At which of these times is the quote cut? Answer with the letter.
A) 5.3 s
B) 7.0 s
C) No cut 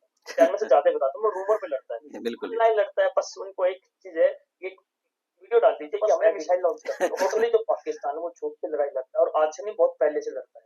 B